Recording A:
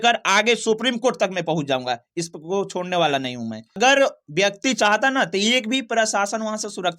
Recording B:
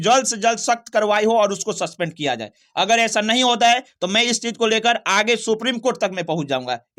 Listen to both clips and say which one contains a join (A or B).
A